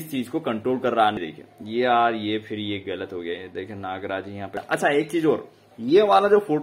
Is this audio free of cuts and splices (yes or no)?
no